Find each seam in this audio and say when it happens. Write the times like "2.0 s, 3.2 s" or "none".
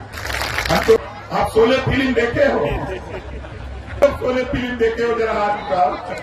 1.0 s, 4.0 s